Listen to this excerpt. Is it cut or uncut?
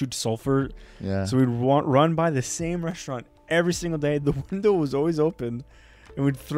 uncut